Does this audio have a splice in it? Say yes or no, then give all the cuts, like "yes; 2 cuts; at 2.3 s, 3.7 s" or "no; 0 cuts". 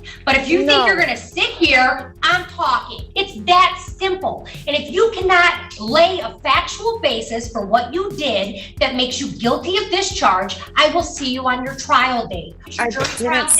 yes; 2 cuts; at 3.0 s, 12.6 s